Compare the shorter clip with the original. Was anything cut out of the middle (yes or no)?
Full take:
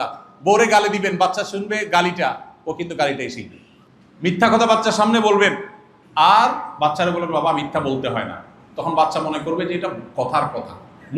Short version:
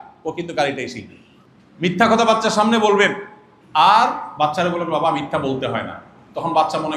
no